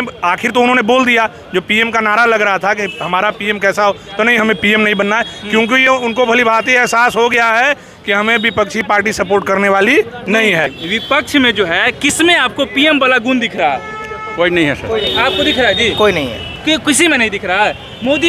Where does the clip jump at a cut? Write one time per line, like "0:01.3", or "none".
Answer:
0:10.8